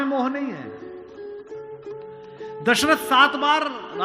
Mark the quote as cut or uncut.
uncut